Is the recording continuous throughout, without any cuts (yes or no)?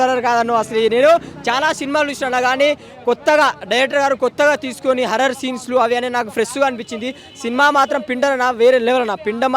yes